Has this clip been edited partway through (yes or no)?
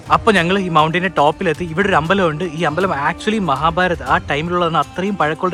no